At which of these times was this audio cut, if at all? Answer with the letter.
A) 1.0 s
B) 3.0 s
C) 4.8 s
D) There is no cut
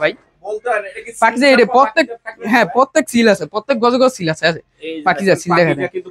D